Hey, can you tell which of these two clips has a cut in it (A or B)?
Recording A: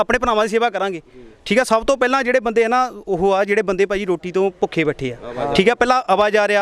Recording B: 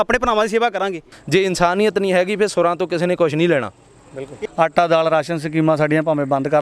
B